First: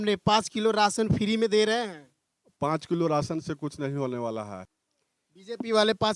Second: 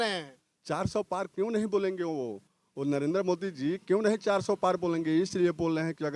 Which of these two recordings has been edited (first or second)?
first